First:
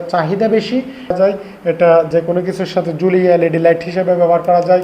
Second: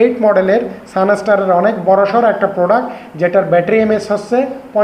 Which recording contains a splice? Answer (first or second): first